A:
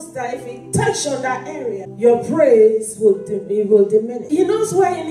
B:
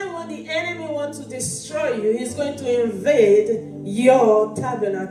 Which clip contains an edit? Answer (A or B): A